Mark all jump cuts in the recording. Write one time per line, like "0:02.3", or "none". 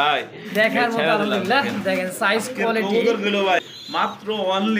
0:03.6